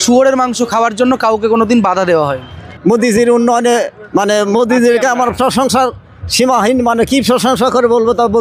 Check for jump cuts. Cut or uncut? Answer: cut